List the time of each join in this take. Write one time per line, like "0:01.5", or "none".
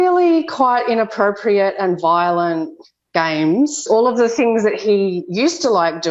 0:03.9